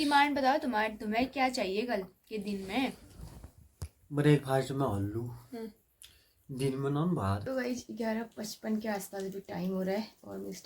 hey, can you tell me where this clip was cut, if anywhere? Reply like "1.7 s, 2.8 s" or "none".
7.4 s